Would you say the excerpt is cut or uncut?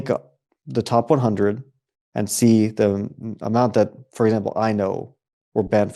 uncut